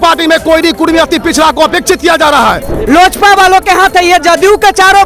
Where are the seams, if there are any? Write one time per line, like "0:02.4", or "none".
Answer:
0:02.7